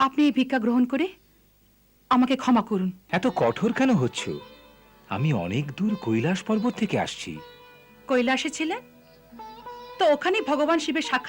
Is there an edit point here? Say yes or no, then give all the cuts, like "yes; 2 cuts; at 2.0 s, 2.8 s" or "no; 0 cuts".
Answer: yes; 1 cut; at 3.0 s